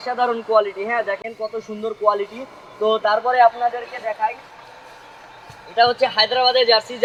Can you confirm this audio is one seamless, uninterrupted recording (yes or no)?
yes